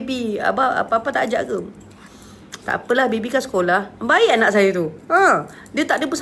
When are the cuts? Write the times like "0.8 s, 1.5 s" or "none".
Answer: none